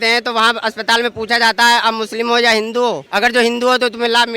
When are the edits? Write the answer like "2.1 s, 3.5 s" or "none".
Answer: 3.1 s